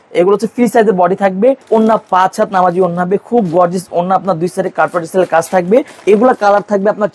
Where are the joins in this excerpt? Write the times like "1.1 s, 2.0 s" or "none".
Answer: 1.6 s, 5.9 s

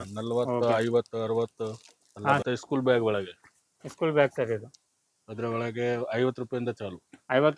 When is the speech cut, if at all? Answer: 2.4 s

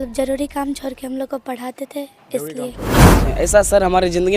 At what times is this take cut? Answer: 3.2 s

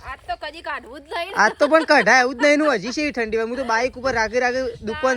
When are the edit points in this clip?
none

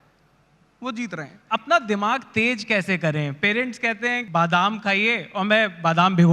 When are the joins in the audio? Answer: 1.4 s, 4.2 s

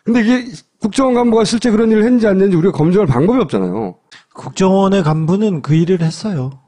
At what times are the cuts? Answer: 2.8 s

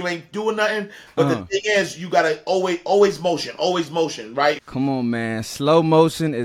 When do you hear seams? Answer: 4.6 s

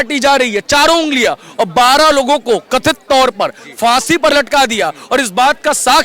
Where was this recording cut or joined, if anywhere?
none

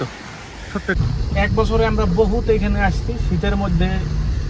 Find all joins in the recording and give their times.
1.1 s

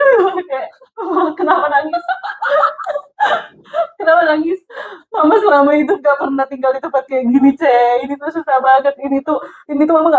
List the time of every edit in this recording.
none

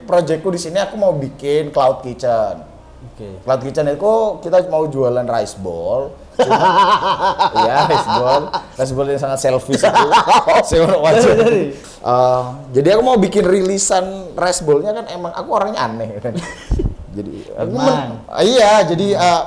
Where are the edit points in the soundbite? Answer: 11.8 s

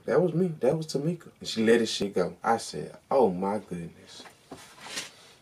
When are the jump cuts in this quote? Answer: 1.9 s, 4.3 s

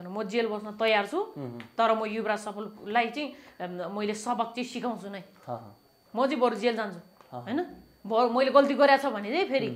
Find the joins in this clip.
none

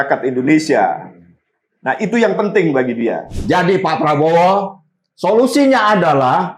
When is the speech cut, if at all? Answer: 3.3 s

